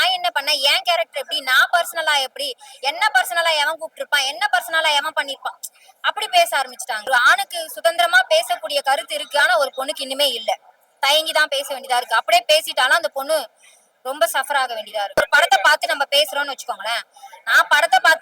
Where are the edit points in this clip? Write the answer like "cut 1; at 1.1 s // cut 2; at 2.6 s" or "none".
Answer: cut 1; at 7.1 s // cut 2; at 15.2 s

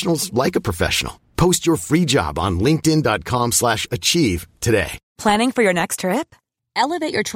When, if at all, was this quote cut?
cut 1; at 5.0 s

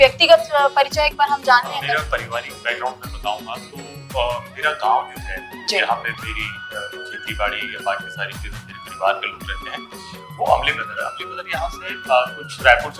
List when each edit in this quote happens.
cut 1; at 1.9 s

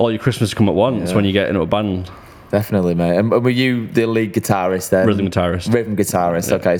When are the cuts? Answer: none

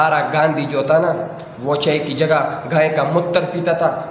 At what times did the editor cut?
none

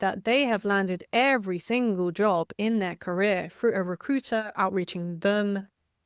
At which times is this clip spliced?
none

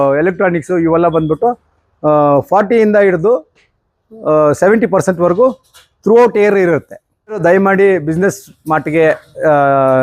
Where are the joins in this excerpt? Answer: cut 1; at 7.3 s

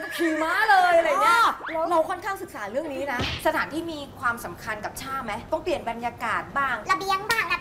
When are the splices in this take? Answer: cut 1; at 3.3 s // cut 2; at 5.4 s // cut 3; at 6.8 s

